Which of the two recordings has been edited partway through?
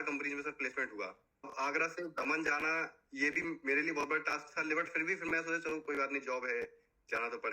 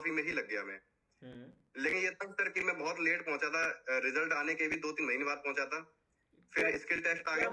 first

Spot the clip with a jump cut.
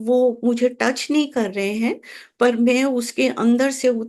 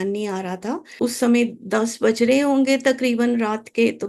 second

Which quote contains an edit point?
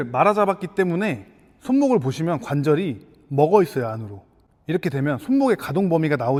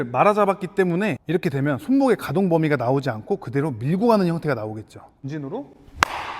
second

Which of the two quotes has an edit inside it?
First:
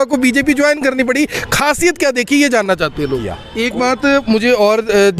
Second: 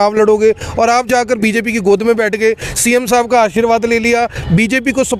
first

